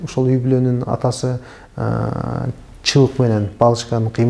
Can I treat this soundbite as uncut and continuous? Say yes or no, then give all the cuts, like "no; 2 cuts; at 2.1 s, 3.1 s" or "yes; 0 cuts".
yes; 0 cuts